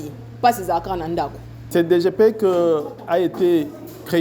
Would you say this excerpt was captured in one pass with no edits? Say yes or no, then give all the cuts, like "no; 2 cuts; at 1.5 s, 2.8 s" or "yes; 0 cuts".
no; 1 cut; at 1.7 s